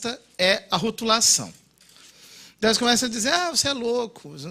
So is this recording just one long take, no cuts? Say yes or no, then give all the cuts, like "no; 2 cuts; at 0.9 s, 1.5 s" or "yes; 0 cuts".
no; 1 cut; at 1.2 s